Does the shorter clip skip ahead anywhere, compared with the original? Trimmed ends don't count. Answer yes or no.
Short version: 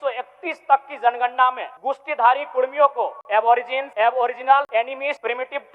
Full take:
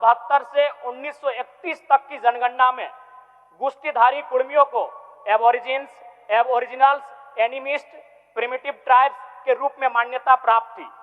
yes